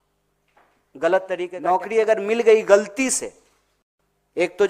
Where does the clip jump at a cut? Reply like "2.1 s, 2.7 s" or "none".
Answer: 1.6 s